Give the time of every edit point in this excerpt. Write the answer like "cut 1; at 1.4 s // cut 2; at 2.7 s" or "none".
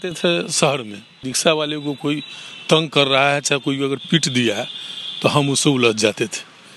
cut 1; at 1.3 s